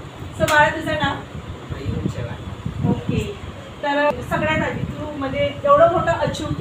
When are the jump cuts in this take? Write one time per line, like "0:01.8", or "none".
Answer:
0:04.1